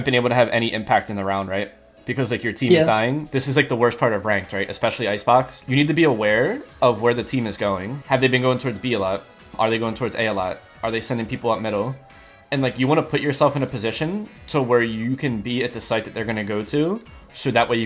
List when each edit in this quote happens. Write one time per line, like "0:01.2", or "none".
0:05.7
0:07.9
0:09.5